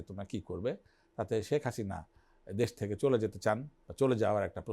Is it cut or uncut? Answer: uncut